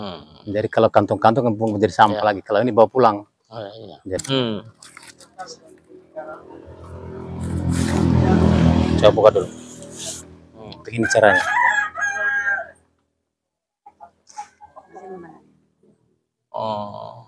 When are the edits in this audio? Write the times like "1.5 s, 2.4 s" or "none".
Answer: 4.2 s